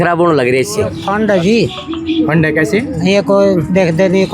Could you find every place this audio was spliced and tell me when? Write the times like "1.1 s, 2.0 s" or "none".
1.0 s